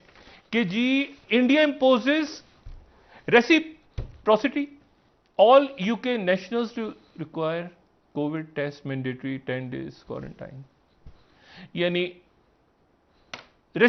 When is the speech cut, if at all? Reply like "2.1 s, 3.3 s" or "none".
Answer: none